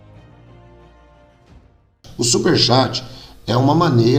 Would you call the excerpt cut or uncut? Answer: cut